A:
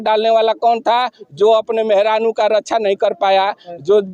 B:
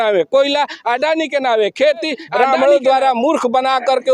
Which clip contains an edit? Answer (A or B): B